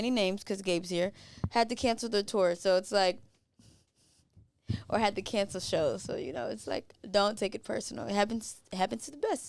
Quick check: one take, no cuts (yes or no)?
yes